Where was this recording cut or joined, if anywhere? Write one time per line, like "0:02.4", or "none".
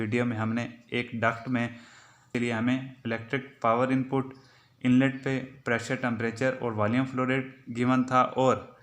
0:02.3